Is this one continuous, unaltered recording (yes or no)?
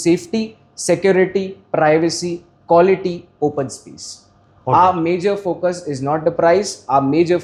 yes